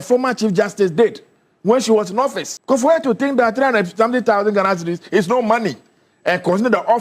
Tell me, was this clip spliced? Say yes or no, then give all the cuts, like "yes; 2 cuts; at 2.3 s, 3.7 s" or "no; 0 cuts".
yes; 1 cut; at 2.5 s